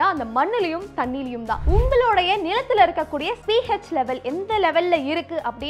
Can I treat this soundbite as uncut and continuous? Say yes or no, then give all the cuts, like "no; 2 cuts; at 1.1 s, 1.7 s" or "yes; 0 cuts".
no; 2 cuts; at 1.6 s, 3.4 s